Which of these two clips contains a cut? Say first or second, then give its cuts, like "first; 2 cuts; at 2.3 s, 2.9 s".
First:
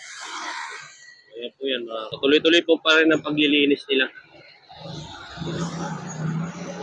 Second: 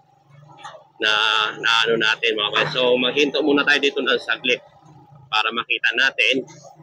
first; 1 cut; at 2.1 s